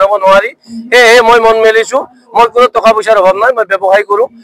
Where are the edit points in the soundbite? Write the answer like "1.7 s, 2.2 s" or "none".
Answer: none